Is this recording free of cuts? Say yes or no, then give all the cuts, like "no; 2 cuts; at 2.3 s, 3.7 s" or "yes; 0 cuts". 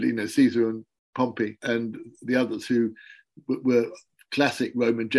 no; 1 cut; at 1.6 s